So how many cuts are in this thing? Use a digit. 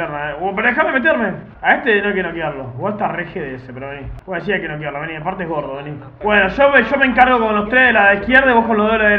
3